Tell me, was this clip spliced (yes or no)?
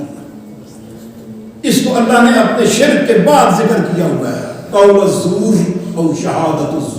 yes